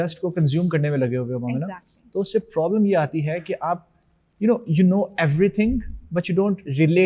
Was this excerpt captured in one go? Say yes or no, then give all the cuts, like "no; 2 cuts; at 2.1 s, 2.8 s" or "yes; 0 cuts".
yes; 0 cuts